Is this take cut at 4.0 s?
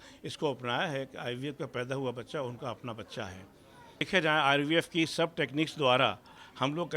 yes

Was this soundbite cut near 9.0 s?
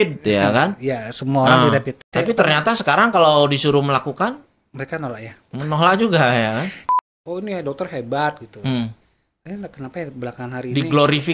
no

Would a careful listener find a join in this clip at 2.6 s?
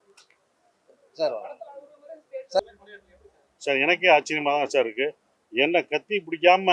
yes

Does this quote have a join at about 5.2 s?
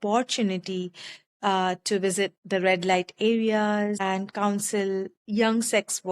yes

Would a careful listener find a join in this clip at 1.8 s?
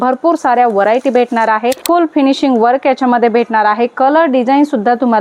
yes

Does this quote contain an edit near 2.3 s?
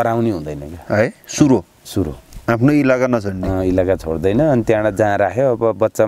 yes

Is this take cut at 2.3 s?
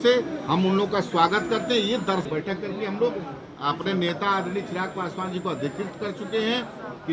yes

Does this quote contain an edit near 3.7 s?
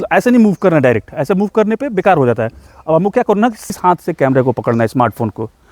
yes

